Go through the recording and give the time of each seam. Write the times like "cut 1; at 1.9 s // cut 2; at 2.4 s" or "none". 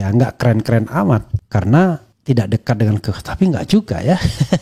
cut 1; at 1.4 s // cut 2; at 2.1 s

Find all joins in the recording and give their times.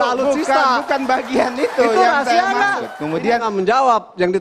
cut 1; at 2.9 s

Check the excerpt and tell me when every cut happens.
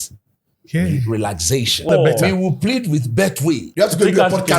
cut 1; at 1.9 s // cut 2; at 3.7 s

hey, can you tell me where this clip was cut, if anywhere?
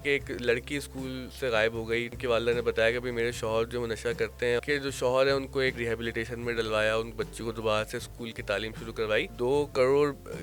cut 1; at 1.3 s // cut 2; at 2.1 s // cut 3; at 4.6 s // cut 4; at 5.8 s // cut 5; at 9.3 s

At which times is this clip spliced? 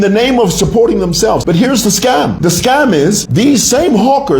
cut 1; at 1.4 s // cut 2; at 2.3 s // cut 3; at 3.2 s

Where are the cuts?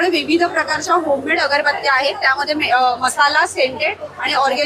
none

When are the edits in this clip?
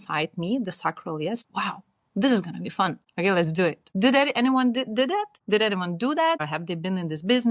cut 1; at 1.4 s // cut 2; at 3.0 s // cut 3; at 3.8 s // cut 4; at 5.4 s // cut 5; at 6.5 s

